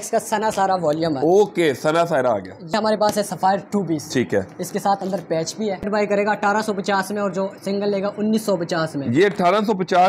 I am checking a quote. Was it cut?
yes; 2 cuts; at 2.7 s, 5.9 s

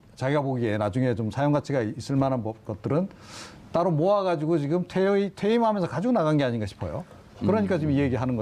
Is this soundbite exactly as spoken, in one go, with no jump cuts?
no; 1 cut; at 2.1 s

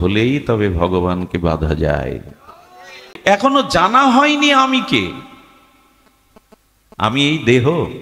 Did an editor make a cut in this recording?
yes; 1 cut; at 3.1 s

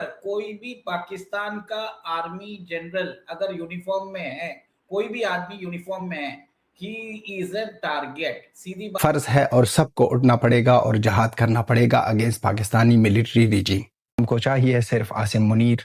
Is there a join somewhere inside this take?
no; 0 cuts

